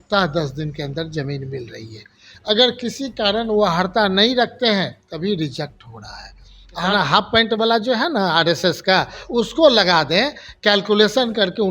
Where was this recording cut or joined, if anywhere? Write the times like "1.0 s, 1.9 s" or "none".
6.9 s